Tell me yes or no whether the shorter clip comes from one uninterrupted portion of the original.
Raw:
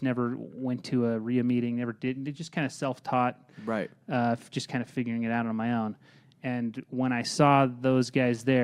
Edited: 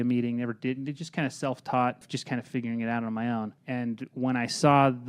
no